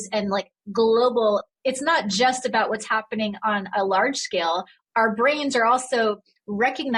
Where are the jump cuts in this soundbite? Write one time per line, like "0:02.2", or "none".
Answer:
none